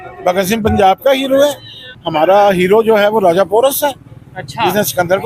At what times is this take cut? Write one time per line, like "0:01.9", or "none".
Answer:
none

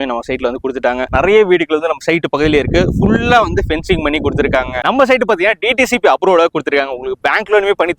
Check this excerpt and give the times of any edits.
0:01.1
0:04.8

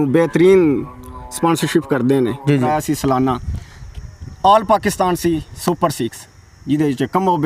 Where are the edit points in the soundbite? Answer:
0:02.6

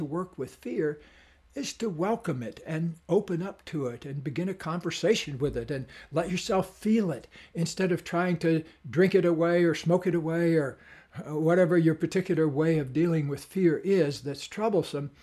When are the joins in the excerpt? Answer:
none

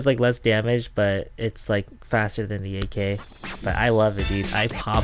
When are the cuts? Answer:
none

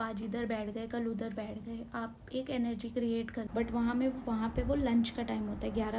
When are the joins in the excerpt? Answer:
0:03.4

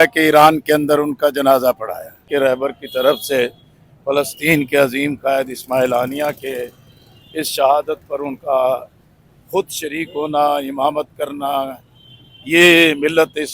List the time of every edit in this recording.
0:02.3

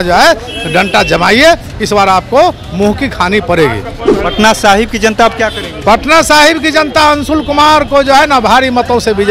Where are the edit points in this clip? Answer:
none

